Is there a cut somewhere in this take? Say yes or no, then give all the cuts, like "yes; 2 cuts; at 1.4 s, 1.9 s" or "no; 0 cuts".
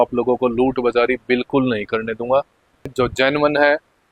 yes; 1 cut; at 2.9 s